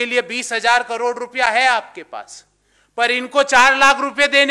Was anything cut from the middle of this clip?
no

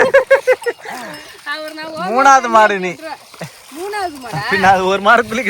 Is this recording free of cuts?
yes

